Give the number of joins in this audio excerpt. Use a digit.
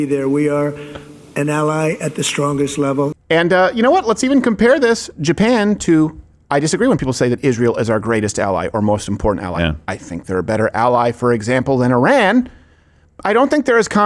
1